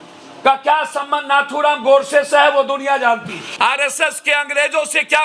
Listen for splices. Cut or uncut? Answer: cut